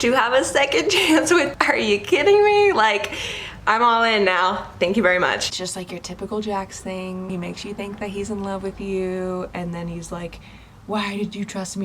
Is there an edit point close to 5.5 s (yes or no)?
yes